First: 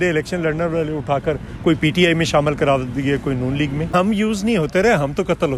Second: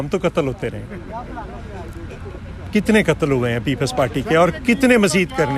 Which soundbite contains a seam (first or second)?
first